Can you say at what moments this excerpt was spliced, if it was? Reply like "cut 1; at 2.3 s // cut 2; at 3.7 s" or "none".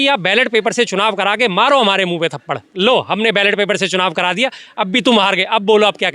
none